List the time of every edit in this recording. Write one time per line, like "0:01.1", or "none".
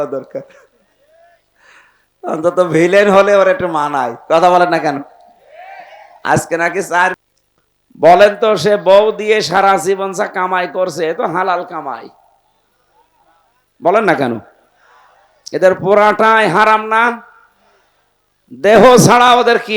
0:07.2